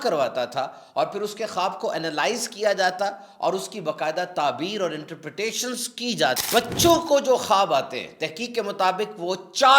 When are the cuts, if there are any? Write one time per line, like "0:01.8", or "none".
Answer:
0:06.4